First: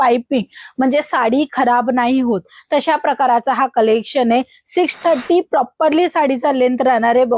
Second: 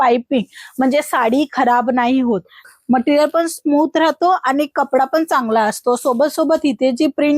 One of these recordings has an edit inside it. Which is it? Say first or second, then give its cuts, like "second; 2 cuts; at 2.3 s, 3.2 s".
second; 1 cut; at 2.6 s